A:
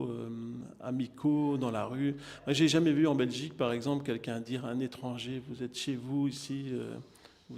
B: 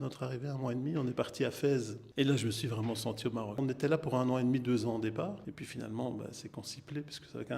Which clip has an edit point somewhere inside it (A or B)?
B